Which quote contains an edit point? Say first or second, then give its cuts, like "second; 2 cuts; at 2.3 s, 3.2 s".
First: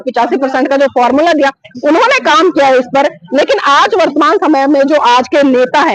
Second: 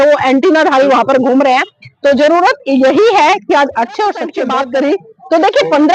second; 1 cut; at 4.4 s